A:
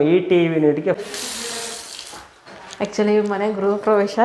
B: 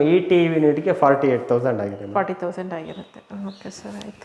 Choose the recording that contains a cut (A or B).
A